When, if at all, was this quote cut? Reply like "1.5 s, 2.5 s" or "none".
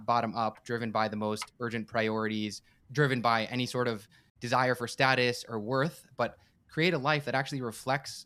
none